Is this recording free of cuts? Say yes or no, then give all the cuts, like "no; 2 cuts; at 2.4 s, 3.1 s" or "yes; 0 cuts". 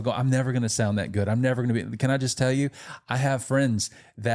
yes; 0 cuts